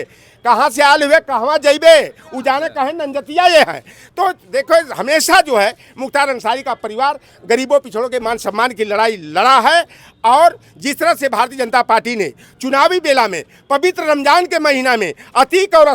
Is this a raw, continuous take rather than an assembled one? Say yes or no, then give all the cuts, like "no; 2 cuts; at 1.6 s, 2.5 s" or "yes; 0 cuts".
yes; 0 cuts